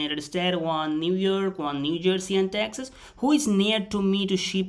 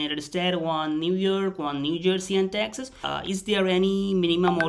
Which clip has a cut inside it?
second; 1 cut; at 3.0 s

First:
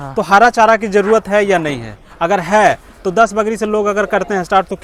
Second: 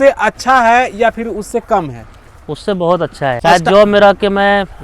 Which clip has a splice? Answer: second; 1 cut; at 3.4 s

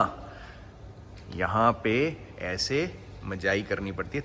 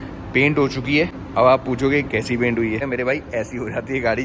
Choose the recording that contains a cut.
second; 2 cuts; at 1.2 s, 2.8 s

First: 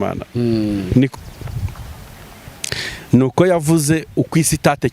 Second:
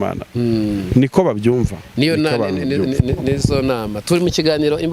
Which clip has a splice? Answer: first; 1 cut; at 1.1 s

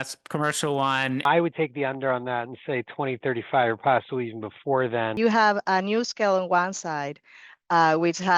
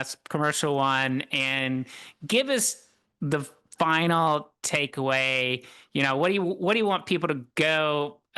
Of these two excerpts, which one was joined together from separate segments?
first; 2 cuts; at 1.2 s, 5.2 s

